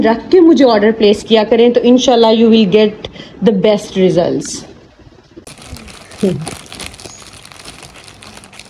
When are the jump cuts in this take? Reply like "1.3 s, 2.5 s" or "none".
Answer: 5.3 s